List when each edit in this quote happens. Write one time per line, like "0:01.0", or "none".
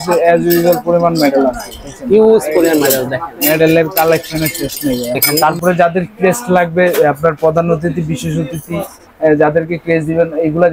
0:05.3